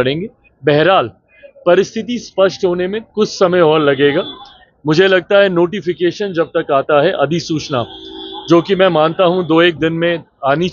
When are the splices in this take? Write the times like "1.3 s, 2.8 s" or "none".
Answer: none